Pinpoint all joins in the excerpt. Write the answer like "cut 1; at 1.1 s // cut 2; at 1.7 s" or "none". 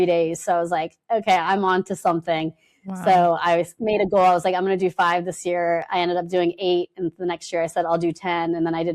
none